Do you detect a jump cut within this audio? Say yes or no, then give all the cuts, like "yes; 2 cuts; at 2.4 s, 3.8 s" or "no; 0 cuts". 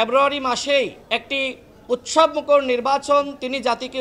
no; 0 cuts